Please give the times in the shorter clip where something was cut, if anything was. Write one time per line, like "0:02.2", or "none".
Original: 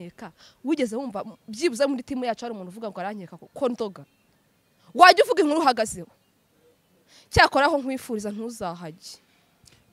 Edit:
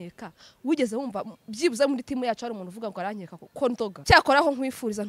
0:04.0